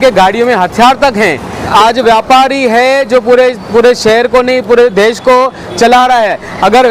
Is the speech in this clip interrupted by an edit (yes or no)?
yes